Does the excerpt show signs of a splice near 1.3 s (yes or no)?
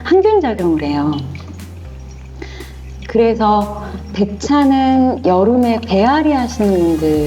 no